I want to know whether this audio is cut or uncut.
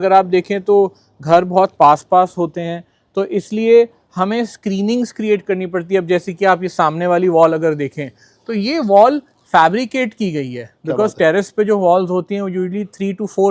uncut